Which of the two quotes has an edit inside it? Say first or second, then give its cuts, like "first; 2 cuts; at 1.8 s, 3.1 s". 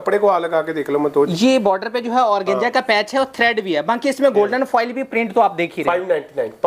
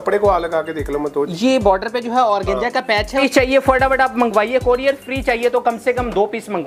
second; 1 cut; at 3.2 s